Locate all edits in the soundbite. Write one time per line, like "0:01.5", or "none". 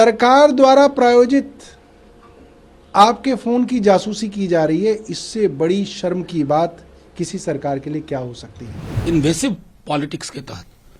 0:09.0